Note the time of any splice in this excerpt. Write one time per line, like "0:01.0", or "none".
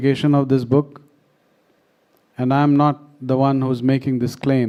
none